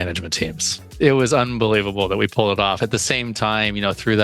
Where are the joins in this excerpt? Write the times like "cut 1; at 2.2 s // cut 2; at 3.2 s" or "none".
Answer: cut 1; at 0.9 s